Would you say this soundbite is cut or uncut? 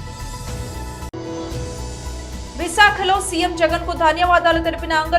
cut